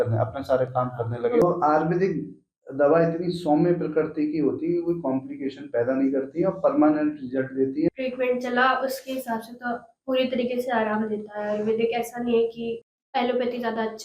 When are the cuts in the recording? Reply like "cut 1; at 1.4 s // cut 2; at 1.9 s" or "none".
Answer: cut 1; at 1.4 s // cut 2; at 7.9 s // cut 3; at 12.9 s